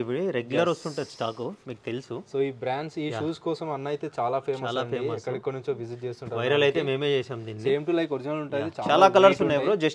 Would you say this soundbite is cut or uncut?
uncut